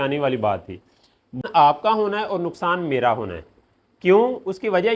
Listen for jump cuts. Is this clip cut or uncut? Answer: cut